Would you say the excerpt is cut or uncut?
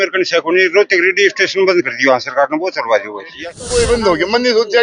cut